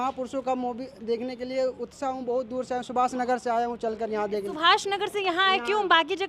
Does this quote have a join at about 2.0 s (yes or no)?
no